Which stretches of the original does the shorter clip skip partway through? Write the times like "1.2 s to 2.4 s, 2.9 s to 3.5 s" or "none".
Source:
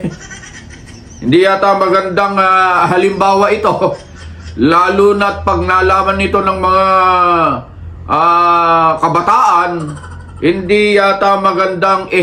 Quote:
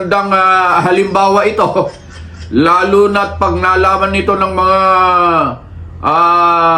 none